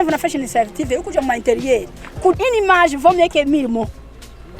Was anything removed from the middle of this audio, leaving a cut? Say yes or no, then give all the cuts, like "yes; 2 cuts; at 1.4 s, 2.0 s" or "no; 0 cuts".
yes; 1 cut; at 2.4 s